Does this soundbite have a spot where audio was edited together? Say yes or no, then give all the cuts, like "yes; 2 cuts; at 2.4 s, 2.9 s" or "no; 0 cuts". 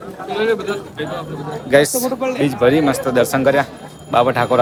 no; 0 cuts